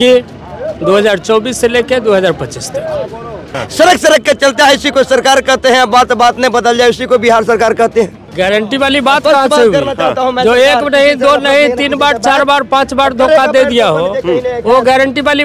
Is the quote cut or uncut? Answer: cut